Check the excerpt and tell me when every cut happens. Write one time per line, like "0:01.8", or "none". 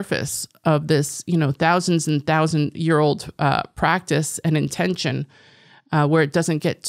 none